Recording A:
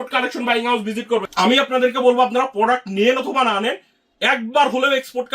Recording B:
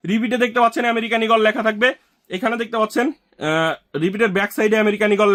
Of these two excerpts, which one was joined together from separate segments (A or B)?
A